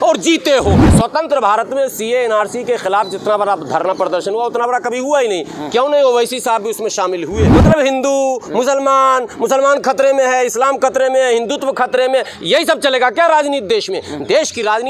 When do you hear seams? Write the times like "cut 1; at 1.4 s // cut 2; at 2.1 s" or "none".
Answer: cut 1; at 0.8 s // cut 2; at 7.5 s